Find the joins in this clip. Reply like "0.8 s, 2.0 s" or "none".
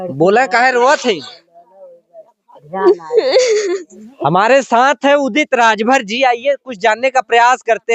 none